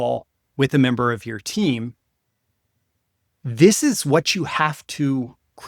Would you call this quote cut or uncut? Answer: uncut